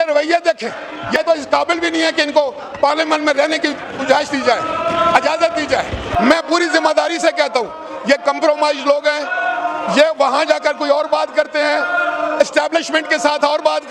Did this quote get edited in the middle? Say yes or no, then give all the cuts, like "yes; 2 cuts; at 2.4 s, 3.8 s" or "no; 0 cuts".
yes; 2 cuts; at 1.2 s, 6.1 s